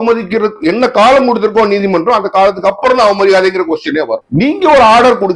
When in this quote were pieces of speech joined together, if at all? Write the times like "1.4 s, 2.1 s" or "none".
4.2 s